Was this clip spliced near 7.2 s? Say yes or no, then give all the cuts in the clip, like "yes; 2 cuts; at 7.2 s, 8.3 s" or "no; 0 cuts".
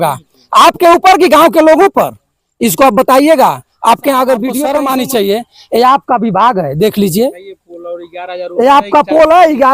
no; 1 cut; at 4.7 s